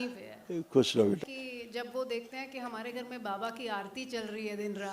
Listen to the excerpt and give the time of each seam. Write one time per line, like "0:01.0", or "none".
0:01.2